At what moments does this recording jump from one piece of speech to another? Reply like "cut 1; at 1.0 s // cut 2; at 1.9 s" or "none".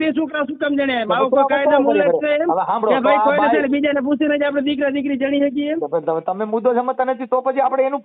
none